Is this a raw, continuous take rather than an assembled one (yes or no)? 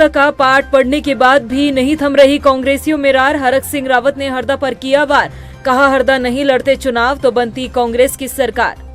yes